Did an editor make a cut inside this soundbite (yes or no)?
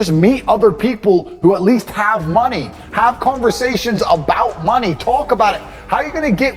no